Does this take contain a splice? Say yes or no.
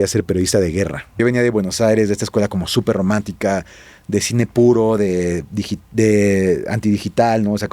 yes